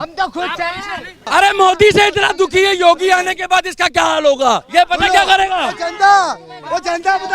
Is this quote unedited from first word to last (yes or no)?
no